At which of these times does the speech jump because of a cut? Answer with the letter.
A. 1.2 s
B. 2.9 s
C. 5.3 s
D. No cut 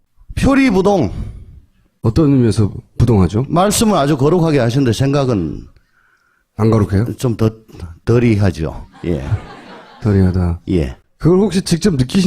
C